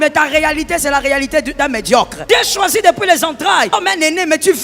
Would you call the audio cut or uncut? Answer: cut